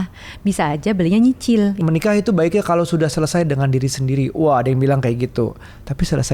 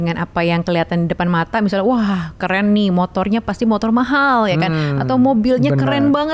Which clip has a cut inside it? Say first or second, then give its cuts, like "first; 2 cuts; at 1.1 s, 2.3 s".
first; 1 cut; at 1.8 s